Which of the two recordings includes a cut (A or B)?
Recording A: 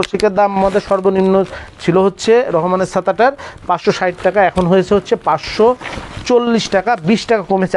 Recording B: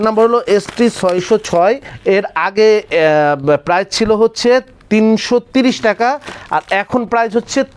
B